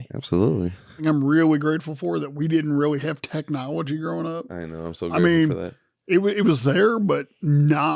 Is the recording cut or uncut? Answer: cut